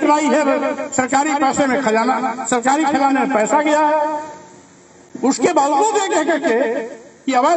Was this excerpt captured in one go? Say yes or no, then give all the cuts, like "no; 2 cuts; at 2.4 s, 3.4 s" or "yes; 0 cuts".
yes; 0 cuts